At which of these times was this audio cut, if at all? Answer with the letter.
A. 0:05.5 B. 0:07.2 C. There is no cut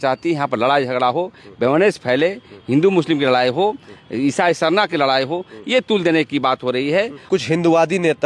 B